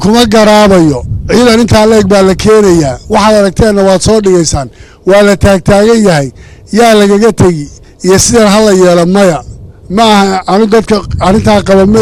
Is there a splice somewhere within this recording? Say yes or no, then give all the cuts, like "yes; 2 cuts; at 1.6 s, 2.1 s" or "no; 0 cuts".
no; 0 cuts